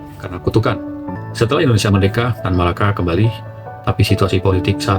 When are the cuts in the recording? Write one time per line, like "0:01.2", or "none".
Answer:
0:01.2